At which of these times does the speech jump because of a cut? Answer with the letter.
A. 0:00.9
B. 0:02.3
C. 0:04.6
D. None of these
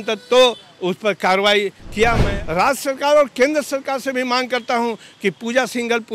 B